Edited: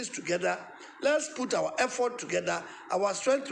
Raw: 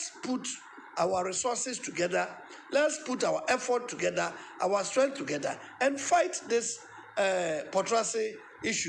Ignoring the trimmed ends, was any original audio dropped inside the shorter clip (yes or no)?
no